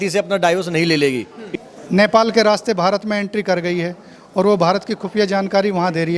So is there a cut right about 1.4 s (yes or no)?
yes